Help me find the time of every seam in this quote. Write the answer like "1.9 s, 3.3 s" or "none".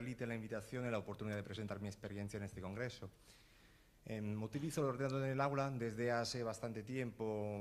none